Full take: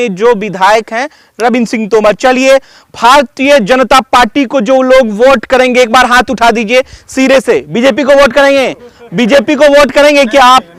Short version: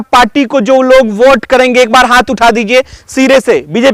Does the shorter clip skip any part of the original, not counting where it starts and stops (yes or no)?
no